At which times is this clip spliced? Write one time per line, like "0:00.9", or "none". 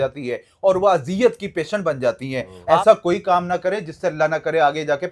0:02.6